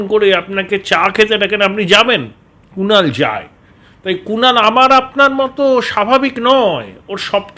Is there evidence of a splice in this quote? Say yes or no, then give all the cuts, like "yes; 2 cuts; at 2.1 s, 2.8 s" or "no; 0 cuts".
no; 0 cuts